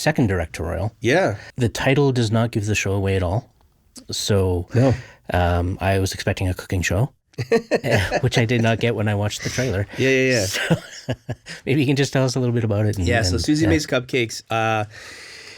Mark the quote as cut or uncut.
cut